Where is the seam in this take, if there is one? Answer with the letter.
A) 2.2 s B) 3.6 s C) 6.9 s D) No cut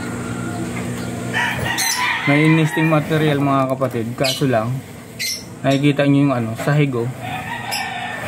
D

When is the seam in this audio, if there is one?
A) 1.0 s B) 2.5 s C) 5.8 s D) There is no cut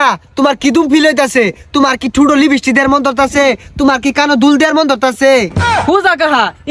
C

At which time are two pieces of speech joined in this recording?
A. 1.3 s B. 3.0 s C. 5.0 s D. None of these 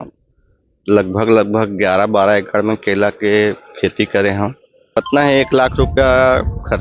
C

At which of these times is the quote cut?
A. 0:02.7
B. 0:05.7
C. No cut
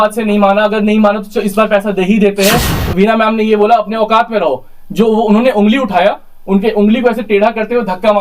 A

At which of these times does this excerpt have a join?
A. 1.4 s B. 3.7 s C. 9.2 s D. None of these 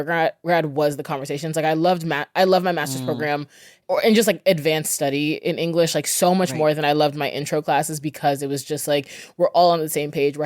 B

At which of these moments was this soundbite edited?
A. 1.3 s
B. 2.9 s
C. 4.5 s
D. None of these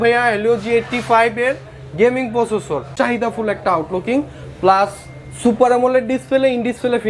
B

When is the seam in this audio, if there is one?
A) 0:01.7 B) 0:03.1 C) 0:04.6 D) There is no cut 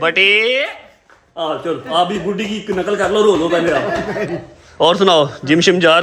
D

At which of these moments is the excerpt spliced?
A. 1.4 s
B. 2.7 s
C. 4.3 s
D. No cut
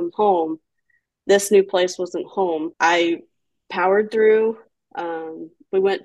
B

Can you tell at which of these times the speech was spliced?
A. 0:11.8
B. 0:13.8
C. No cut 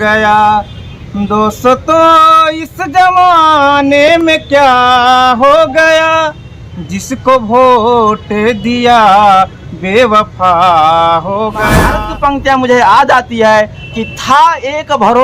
A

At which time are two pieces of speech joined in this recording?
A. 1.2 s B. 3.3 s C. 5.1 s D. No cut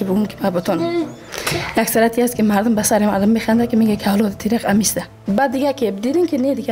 C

